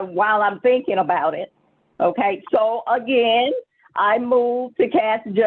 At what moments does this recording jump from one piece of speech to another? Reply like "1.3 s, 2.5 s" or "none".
none